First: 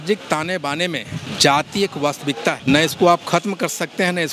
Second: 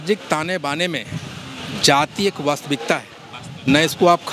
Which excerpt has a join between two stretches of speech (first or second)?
first